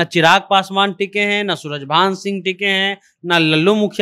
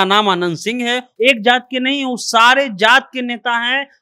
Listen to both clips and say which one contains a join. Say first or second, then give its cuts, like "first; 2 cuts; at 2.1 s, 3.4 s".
second; 1 cut; at 1.1 s